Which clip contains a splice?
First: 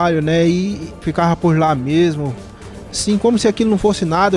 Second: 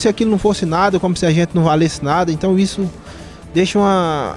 first; 1 cut; at 1.0 s

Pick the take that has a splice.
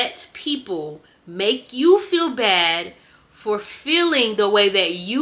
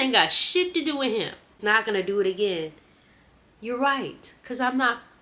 second; 1 cut; at 1.5 s

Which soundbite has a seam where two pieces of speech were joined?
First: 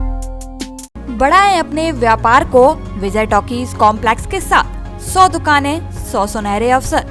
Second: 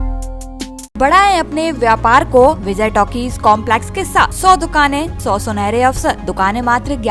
second; 5 cuts; at 1.0 s, 2.6 s, 4.3 s, 5.1 s, 6.2 s

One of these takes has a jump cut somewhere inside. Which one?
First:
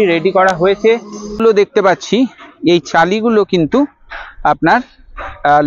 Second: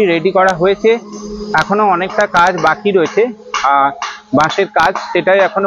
first; 1 cut; at 1.4 s

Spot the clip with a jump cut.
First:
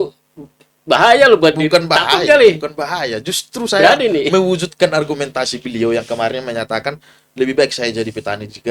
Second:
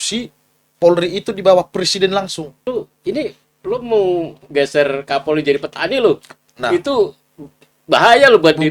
second; 1 cut; at 2.7 s

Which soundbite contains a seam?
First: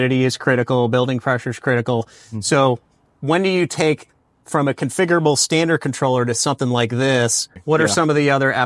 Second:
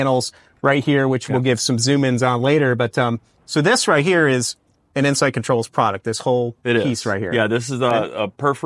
first; 1 cut; at 7.6 s

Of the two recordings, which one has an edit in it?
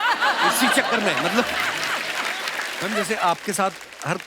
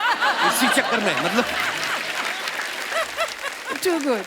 first; 1 cut; at 2.8 s

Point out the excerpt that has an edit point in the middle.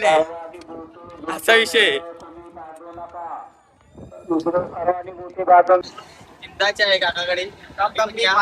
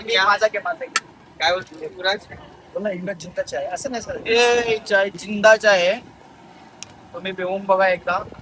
first; 1 cut; at 5.8 s

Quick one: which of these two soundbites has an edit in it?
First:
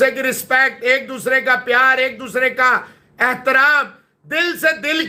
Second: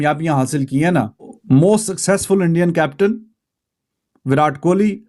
second; 1 cut; at 1.3 s

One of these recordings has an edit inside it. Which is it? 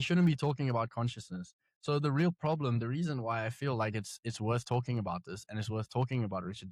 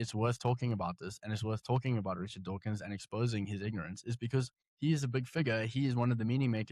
second; 1 cut; at 4.6 s

